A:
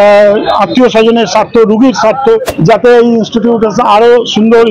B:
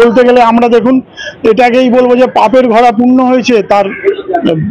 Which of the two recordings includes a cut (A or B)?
A